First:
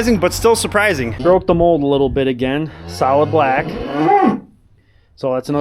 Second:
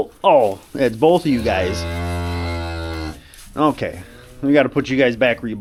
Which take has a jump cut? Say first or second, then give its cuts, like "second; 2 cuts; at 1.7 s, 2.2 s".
first; 1 cut; at 1.2 s